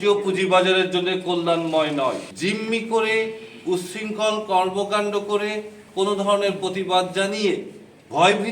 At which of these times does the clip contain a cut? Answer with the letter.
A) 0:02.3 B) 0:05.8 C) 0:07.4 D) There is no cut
A